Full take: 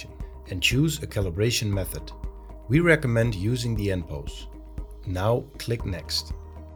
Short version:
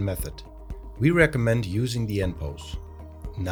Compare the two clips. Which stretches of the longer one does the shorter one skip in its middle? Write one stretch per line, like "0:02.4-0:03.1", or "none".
none